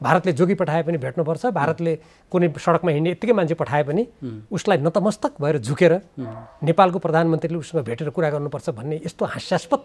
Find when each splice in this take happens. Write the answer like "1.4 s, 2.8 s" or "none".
none